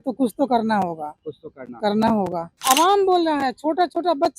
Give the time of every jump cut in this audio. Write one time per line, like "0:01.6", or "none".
0:02.5